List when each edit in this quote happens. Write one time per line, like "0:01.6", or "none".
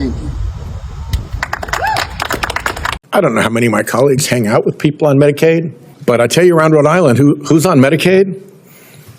0:02.9